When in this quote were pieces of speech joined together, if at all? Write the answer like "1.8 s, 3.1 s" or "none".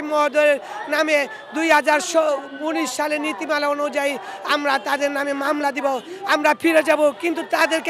none